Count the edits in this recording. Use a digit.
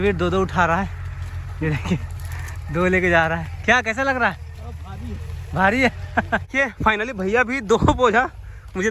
1